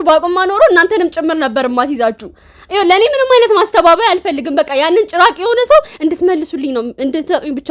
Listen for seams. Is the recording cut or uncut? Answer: uncut